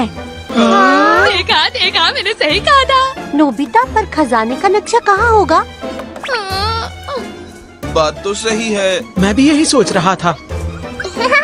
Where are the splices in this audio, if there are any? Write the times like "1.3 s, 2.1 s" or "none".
none